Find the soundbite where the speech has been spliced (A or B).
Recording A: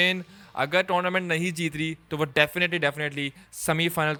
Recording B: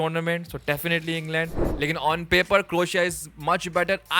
B